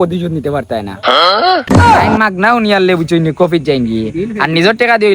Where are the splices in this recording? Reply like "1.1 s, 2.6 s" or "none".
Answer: 2.1 s